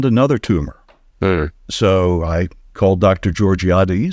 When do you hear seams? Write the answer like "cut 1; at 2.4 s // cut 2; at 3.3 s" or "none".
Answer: cut 1; at 1.6 s // cut 2; at 2.6 s